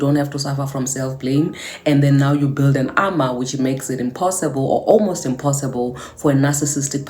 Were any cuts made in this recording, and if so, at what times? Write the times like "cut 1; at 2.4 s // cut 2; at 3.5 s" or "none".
none